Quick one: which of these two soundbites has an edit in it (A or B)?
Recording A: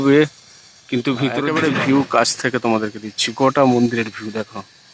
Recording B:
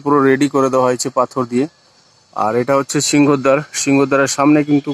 A